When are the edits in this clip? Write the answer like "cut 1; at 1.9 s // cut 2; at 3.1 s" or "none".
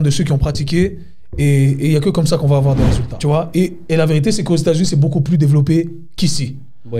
cut 1; at 3.0 s